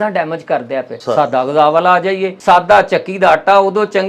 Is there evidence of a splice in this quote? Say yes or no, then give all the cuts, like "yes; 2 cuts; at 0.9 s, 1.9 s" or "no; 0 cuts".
yes; 2 cuts; at 0.9 s, 2.3 s